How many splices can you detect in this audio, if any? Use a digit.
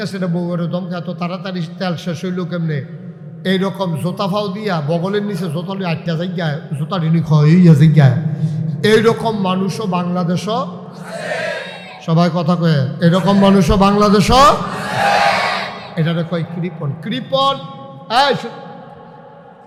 0